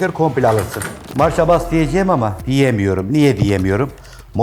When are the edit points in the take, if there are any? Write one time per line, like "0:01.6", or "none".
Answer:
0:00.9
0:02.4